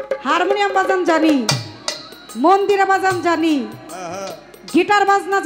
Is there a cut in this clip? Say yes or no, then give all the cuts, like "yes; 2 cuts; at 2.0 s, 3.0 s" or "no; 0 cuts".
no; 0 cuts